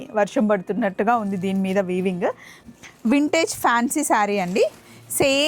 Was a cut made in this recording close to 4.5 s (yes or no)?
no